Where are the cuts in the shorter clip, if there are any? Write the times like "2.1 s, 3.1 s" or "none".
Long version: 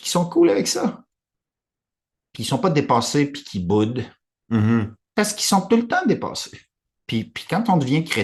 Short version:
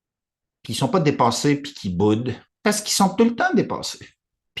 2.5 s